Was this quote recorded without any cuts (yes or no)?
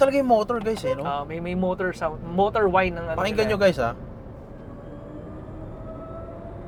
yes